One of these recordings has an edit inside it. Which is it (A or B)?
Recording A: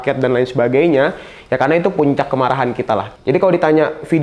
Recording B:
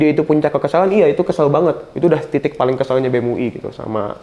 A